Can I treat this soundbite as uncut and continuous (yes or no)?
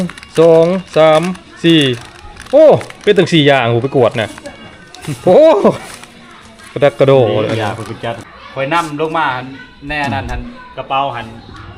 no